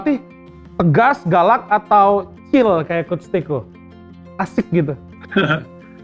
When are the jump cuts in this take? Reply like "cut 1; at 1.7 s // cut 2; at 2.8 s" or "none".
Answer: none